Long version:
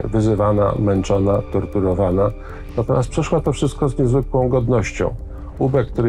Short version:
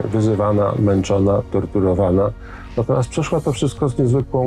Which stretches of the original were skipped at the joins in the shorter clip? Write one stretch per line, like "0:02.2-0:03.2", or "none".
none